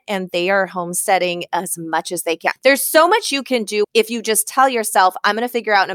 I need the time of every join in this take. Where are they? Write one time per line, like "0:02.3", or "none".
0:02.5
0:03.8